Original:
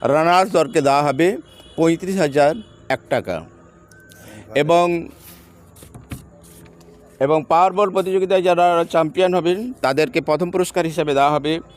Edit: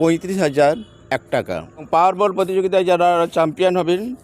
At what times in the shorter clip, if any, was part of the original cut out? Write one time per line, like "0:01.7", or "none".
0:01.9